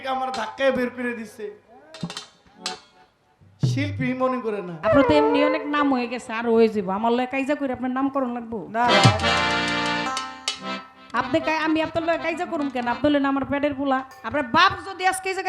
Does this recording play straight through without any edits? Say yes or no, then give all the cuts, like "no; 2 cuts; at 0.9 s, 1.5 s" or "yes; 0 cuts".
no; 2 cuts; at 4.7 s, 14.2 s